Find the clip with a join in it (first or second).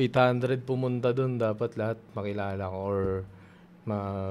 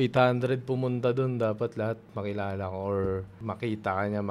second